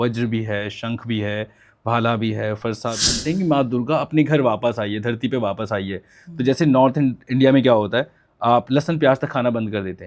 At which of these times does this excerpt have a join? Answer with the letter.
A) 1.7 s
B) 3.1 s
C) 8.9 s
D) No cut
B